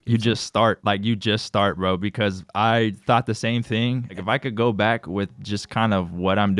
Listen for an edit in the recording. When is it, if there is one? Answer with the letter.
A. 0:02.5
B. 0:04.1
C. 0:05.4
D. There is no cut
B